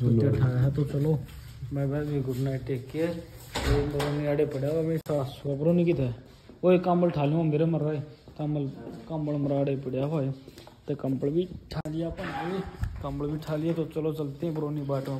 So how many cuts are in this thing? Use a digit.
0